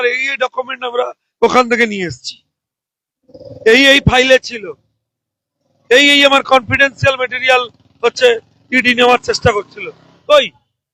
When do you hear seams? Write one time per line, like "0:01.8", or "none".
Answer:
none